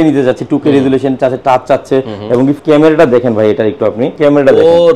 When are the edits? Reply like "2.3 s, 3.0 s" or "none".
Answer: 2.6 s, 4.1 s